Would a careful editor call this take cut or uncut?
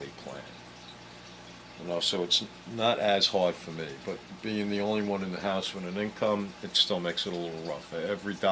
cut